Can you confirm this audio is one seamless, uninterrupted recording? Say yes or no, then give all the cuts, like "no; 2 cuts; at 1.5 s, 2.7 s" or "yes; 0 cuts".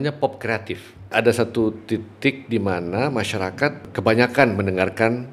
no; 2 cuts; at 1.1 s, 3.9 s